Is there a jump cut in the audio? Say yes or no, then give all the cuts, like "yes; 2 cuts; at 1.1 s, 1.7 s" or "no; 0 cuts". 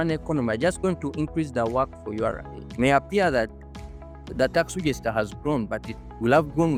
no; 0 cuts